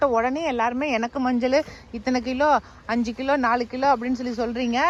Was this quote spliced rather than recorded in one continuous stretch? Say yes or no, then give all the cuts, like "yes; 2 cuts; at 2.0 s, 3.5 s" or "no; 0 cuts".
no; 0 cuts